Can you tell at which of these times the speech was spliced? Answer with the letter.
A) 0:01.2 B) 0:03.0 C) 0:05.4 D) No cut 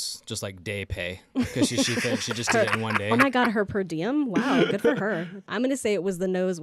C